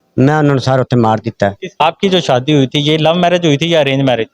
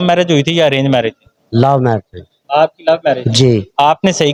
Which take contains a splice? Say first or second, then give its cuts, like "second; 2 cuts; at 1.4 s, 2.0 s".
first; 1 cut; at 1.8 s